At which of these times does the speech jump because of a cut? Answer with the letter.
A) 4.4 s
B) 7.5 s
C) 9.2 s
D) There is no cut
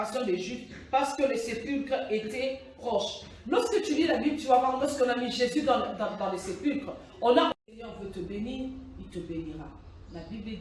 B